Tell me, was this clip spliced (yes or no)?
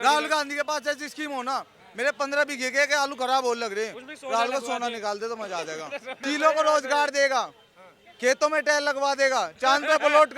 yes